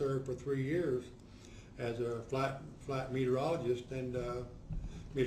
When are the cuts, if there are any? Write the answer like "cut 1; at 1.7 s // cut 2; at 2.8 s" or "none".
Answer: cut 1; at 2.2 s

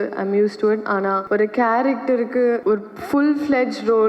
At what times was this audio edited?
cut 1; at 1.2 s // cut 2; at 2.6 s

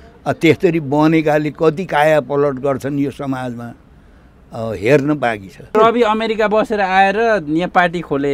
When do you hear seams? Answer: cut 1; at 5.7 s

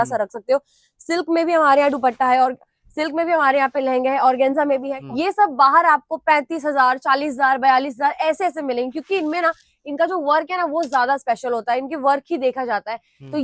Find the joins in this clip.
cut 1; at 4.9 s

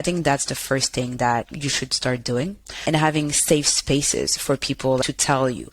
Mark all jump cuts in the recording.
cut 1; at 1.5 s // cut 2; at 5.0 s

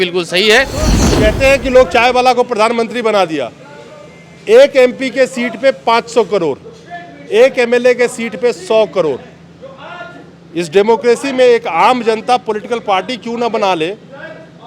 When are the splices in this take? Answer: cut 1; at 1.0 s

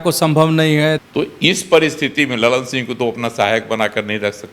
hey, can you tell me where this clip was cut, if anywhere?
cut 1; at 1.0 s

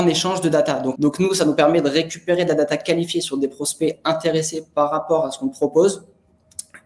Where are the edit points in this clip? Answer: cut 1; at 0.9 s

